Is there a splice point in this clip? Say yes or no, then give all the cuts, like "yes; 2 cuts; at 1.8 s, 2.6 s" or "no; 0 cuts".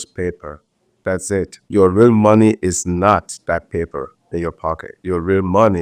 yes; 1 cut; at 1.6 s